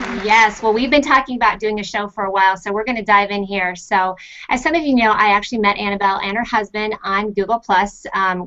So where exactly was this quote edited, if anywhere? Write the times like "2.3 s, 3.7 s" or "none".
2.3 s